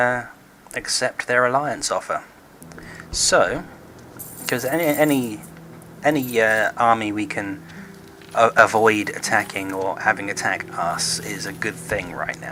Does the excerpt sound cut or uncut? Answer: uncut